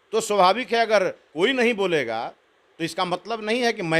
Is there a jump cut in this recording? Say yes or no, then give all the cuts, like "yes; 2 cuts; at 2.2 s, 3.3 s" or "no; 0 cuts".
yes; 1 cut; at 1.2 s